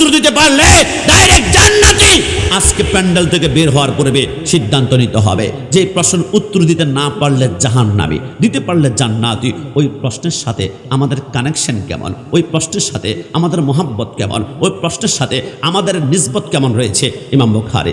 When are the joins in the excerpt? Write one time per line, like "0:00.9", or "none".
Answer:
none